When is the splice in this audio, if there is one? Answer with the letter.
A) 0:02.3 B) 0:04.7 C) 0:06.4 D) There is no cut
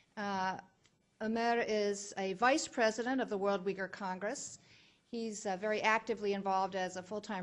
C